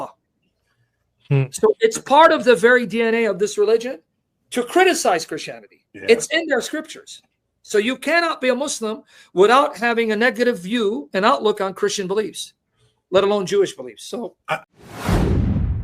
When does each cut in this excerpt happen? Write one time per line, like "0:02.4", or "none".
0:14.6